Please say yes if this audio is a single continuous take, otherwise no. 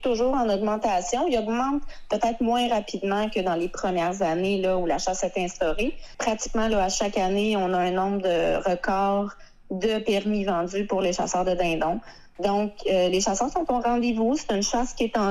no